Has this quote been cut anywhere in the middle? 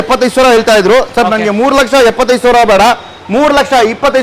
no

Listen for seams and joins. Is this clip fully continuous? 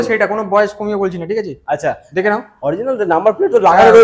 yes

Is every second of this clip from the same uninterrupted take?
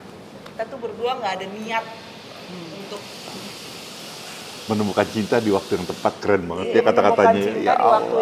yes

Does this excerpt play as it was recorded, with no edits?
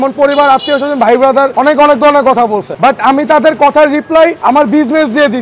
no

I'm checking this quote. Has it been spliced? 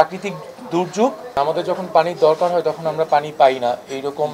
yes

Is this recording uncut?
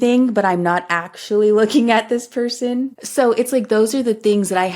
no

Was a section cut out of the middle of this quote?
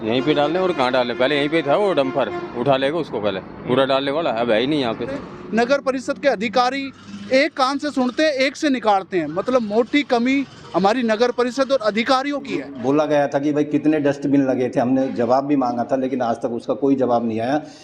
yes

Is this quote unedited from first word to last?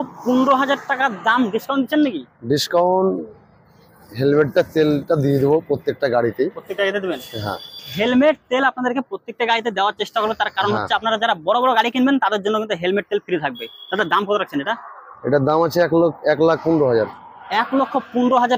yes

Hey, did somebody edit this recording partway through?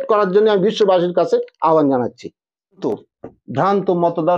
yes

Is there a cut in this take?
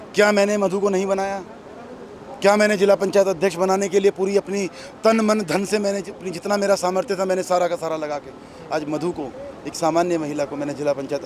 no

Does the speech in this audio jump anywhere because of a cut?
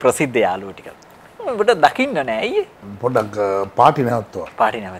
yes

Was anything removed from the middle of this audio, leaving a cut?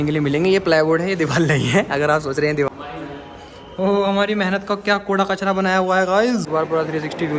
yes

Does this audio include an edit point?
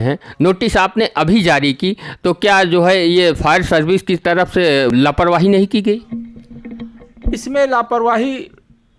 yes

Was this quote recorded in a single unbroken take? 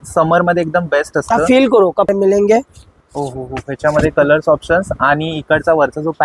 no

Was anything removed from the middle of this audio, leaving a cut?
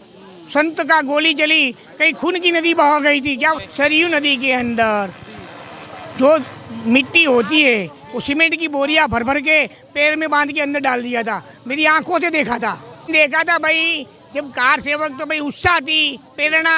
yes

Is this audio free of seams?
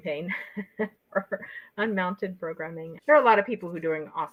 yes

